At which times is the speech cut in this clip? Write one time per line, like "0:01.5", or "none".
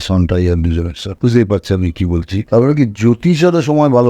0:01.0
0:02.4